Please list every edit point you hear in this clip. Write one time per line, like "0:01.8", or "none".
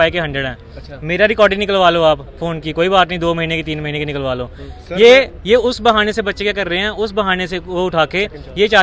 none